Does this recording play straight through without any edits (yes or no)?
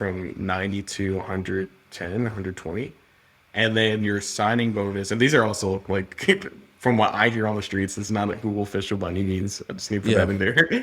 yes